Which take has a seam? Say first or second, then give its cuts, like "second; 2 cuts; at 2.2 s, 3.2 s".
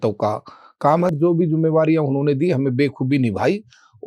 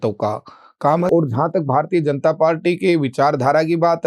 second; 1 cut; at 1.1 s